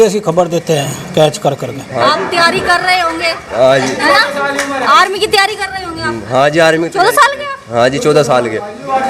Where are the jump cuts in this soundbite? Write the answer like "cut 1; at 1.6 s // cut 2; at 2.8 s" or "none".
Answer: none